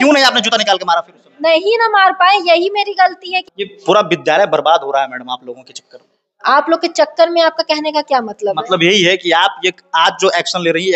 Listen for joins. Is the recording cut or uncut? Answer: cut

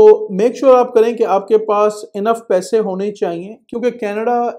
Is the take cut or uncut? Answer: uncut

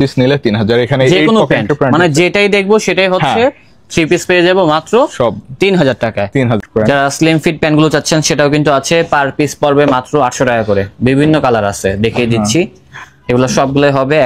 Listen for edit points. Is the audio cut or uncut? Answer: cut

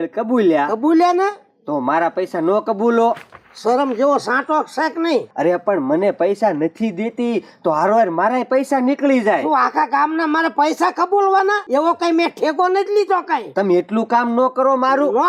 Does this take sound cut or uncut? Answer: uncut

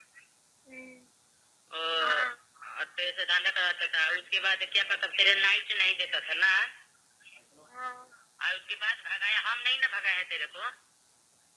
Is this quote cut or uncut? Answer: uncut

